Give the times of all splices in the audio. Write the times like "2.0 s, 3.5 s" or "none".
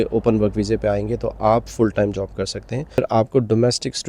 3.0 s

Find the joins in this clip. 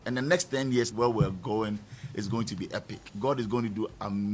0.9 s

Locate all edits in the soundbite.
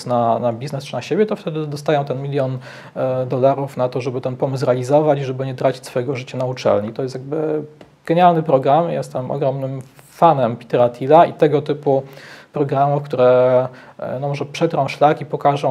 none

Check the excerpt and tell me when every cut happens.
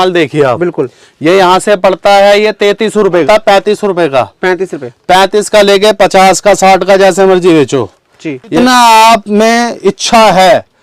3.2 s, 8.5 s

